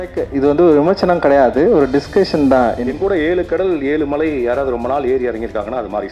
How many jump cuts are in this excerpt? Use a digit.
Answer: 1